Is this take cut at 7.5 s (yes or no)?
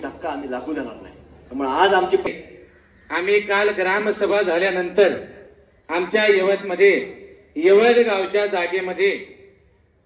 no